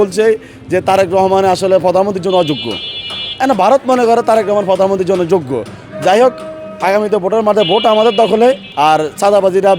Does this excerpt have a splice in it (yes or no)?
yes